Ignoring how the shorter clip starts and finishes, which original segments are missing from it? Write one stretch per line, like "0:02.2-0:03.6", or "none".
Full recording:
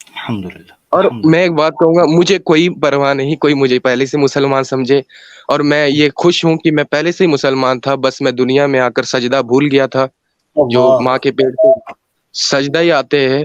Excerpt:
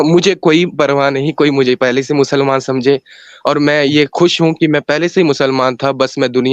none

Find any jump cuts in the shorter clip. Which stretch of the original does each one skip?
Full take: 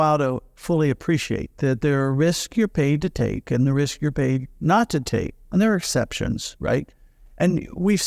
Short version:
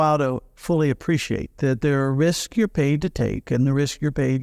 none

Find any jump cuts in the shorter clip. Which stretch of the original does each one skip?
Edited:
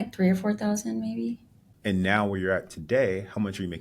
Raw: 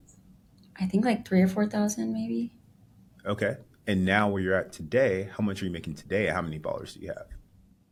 0:02.8-0:03.7

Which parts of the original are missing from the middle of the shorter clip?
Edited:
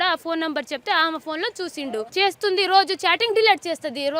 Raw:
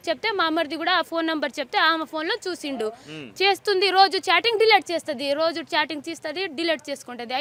0:02.9-0:03.3

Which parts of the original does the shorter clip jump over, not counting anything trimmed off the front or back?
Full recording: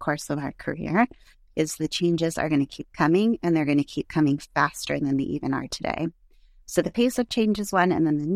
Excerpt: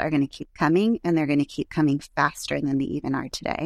none

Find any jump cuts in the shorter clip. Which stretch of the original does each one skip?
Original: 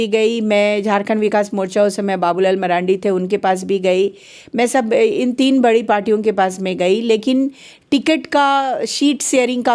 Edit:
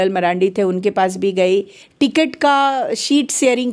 0:04.3-0:07.7

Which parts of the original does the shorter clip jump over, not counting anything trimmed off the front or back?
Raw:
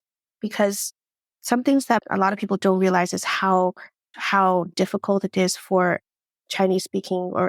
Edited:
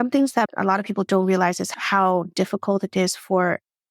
0:03.2-0:04.1

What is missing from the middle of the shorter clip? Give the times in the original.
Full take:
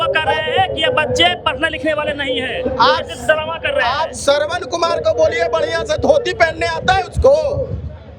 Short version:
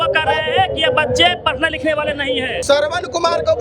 0:02.6-0:04.2

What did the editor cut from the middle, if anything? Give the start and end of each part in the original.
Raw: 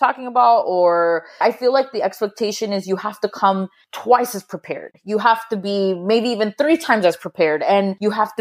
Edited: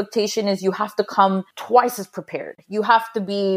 0:03.8-0:03.9

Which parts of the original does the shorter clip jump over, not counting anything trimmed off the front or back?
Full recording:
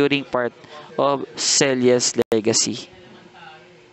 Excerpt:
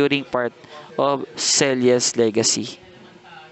0:02.2-0:02.3

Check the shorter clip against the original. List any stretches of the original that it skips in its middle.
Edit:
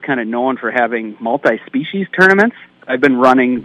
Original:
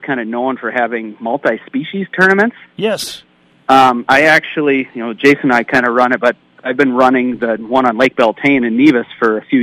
0:02.7-0:06.5

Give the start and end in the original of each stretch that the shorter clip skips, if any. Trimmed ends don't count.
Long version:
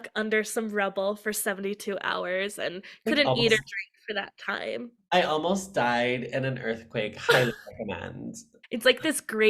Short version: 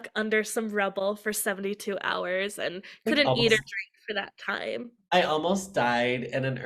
none

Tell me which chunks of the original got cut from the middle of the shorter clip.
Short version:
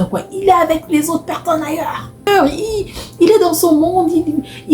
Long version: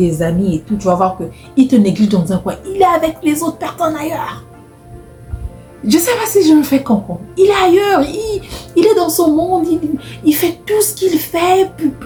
0:04.6-0:07.8

